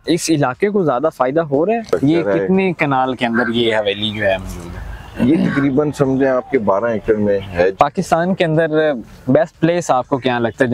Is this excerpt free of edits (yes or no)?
no